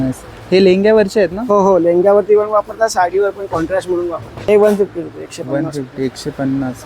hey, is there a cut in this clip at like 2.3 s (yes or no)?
no